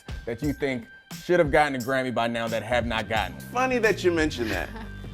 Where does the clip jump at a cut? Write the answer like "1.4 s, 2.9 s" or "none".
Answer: 3.4 s

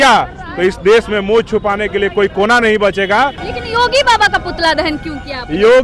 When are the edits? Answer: 3.4 s

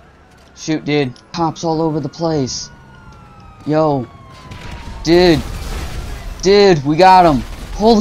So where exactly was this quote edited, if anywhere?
1.3 s

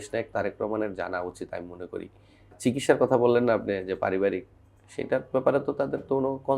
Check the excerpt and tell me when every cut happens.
2.5 s

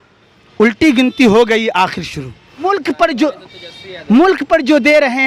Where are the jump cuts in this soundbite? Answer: 2.6 s

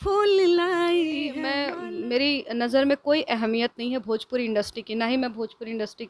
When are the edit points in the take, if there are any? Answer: 1.6 s

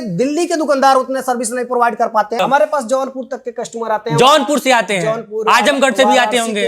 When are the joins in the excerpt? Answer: 2.4 s

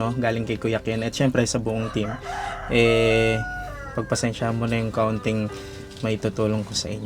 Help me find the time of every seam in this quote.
none

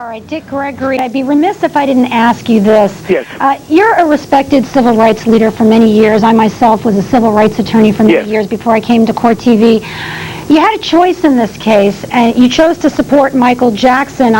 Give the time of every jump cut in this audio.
1.1 s

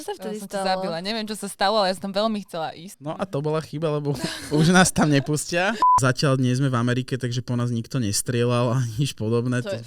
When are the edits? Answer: 2.9 s, 6.0 s

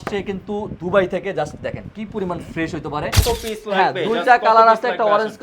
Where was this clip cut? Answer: 3.2 s

